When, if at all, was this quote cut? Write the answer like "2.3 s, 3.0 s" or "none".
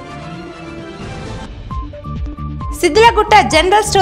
1.3 s